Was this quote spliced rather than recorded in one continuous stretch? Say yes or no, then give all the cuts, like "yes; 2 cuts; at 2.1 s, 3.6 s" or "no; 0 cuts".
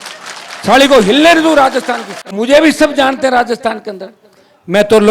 yes; 1 cut; at 2.3 s